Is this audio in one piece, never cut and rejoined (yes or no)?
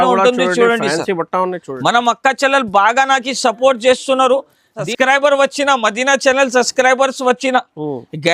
no